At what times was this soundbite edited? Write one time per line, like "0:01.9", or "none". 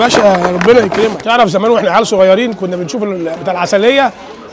0:01.2